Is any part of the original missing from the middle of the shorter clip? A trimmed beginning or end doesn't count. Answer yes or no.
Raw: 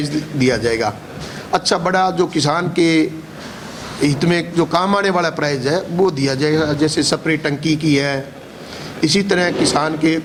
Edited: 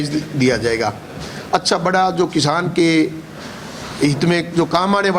no